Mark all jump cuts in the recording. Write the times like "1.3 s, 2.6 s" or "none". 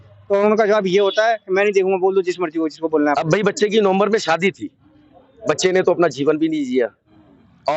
3.2 s